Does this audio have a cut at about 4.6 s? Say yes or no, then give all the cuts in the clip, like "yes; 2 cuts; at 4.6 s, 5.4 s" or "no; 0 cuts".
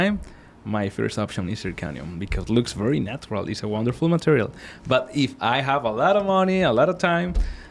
no; 0 cuts